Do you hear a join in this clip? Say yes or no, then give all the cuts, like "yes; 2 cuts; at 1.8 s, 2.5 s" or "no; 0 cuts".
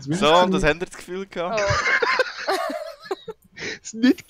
no; 0 cuts